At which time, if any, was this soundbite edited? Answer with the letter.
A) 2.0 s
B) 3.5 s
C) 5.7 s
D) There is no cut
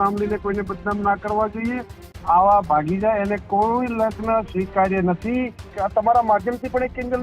C